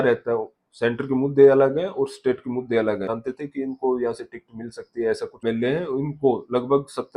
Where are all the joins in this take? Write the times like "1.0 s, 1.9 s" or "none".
3.1 s, 5.4 s

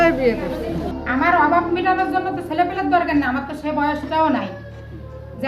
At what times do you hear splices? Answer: 1.0 s

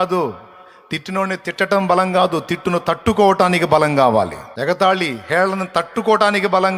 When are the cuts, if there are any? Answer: 4.4 s

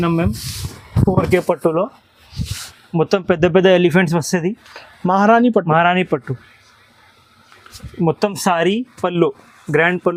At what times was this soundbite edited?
none

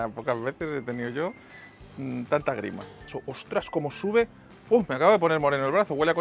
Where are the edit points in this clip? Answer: 3.2 s

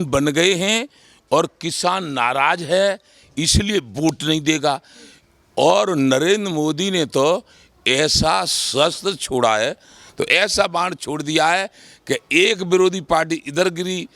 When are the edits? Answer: 10.0 s

